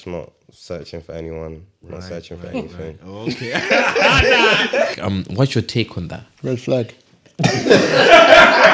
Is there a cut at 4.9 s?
yes; 1 cut; at 4.9 s

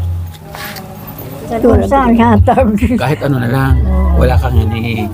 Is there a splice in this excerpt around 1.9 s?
yes; 1 cut; at 1.9 s

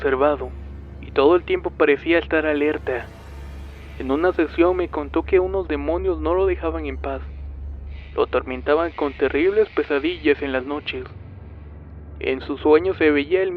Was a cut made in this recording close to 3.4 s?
yes; 1 cut; at 3.4 s

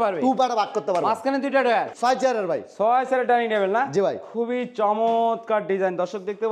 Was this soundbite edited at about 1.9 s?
yes; 1 cut; at 1.9 s

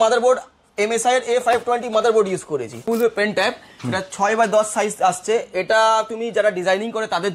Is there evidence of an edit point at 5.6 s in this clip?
no; 1 cut; at 2.9 s

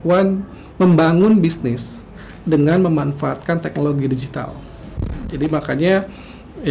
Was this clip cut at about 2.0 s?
no; 0 cuts

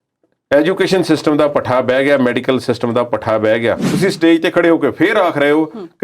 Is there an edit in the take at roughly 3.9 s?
yes; 1 cut; at 3.9 s

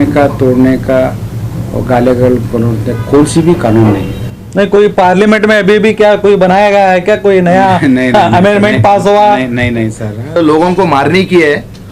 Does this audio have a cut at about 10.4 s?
yes; 1 cut; at 10.4 s

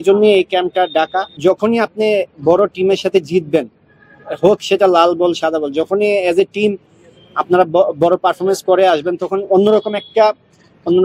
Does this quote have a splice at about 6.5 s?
no; 1 cut; at 1.4 s

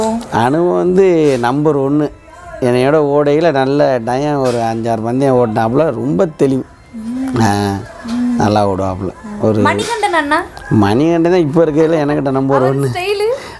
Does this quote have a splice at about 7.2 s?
no; 0 cuts

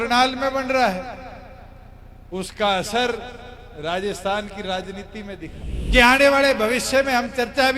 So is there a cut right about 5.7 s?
yes; 1 cut; at 5.7 s

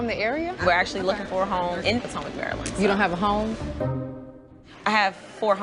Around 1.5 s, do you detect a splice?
no; 1 cut; at 3.8 s

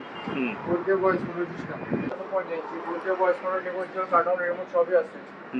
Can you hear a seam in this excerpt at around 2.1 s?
yes; 1 cut; at 2.1 s

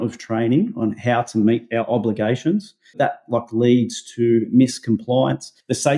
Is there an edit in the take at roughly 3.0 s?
yes; 1 cut; at 3.0 s

